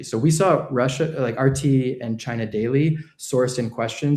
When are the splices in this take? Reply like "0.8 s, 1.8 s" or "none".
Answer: 2.8 s